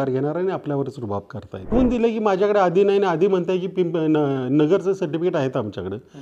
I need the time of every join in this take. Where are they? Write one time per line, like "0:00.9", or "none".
0:01.7